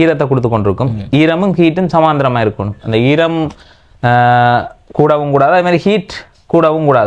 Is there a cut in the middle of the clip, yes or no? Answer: no